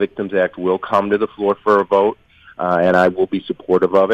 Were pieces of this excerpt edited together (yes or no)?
no